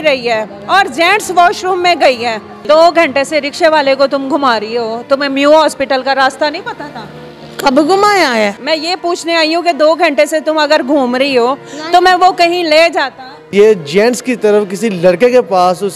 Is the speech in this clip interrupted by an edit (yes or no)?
yes